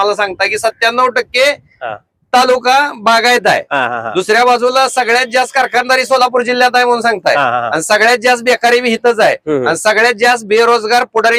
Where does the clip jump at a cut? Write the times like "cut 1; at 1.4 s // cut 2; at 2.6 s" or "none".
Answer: none